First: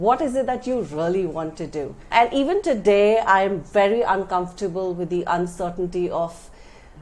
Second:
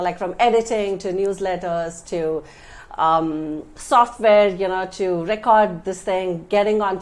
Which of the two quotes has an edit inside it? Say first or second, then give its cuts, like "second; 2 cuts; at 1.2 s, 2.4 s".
first; 1 cut; at 2.1 s